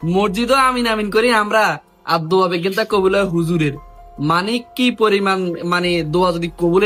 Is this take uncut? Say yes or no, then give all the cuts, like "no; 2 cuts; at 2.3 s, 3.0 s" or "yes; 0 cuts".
yes; 0 cuts